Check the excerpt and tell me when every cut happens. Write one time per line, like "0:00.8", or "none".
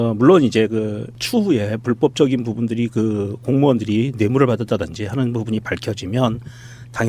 0:03.4